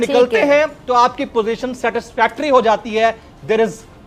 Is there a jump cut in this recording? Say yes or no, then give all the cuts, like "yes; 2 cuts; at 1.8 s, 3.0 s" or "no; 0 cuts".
no; 0 cuts